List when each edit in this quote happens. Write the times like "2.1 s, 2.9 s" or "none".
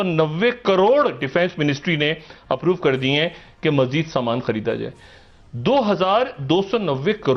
none

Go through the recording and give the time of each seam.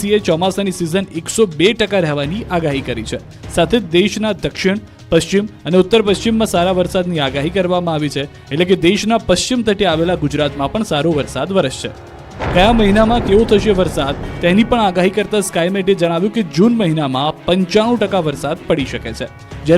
17.4 s

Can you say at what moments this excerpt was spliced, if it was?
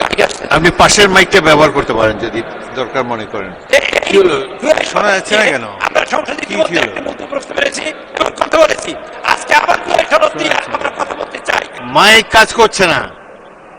3.6 s, 11.8 s

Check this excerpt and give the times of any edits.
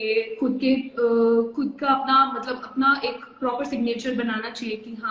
none

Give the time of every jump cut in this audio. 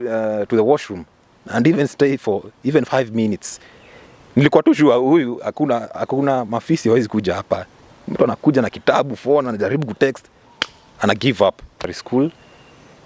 12.0 s

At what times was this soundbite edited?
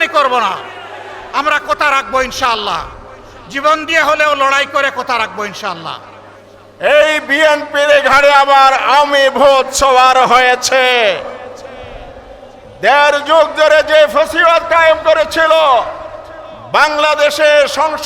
6.5 s

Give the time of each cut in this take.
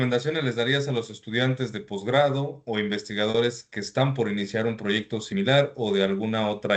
none

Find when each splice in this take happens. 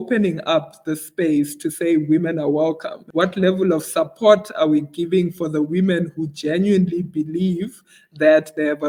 none

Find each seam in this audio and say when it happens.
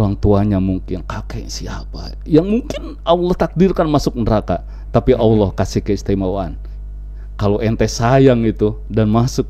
none

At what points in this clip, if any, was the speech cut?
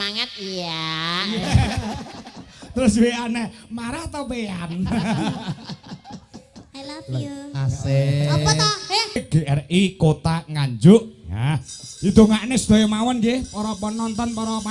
9.2 s

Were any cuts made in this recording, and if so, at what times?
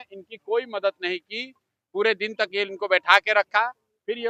none

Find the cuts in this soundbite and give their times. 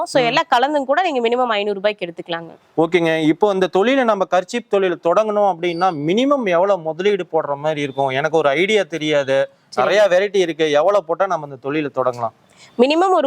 none

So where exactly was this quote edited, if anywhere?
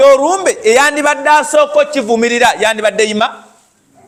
none

